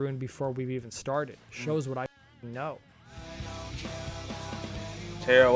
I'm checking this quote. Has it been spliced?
no; 0 cuts

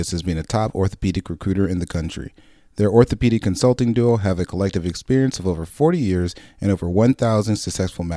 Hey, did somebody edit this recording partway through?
no; 0 cuts

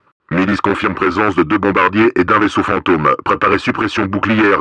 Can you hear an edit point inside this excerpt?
no; 0 cuts

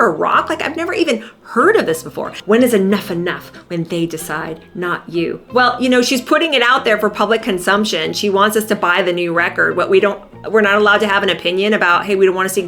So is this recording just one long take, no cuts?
no; 1 cut; at 2.3 s

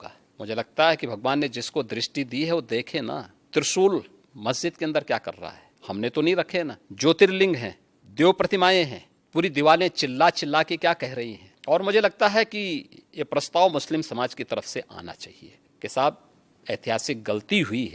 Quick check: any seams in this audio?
no; 0 cuts

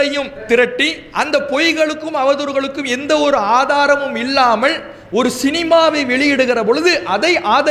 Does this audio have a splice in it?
no; 0 cuts

